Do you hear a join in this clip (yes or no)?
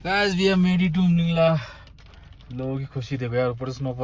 no